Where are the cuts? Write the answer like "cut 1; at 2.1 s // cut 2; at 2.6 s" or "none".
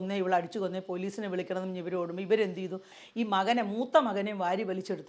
cut 1; at 3.0 s